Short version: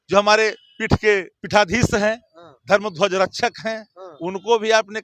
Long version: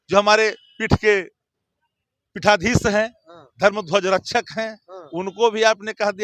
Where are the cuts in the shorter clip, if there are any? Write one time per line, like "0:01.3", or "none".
0:01.4